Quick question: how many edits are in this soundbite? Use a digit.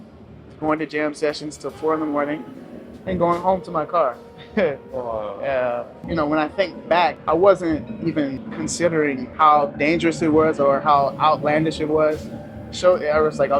4